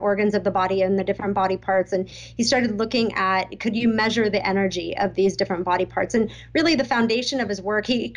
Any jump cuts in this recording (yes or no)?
no